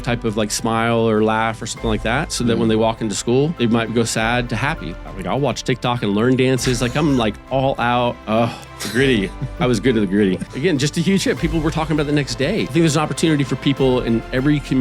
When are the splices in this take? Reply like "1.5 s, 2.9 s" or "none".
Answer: 3.5 s, 4.9 s, 8.2 s, 10.5 s, 12.7 s